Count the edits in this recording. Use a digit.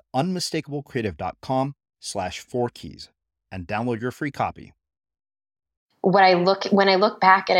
1